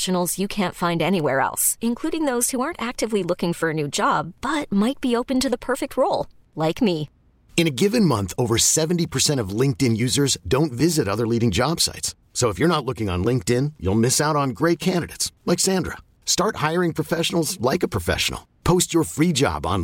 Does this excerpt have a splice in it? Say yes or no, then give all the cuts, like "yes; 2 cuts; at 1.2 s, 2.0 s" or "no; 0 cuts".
no; 0 cuts